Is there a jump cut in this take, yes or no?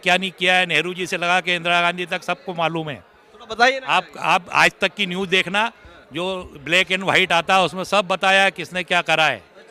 no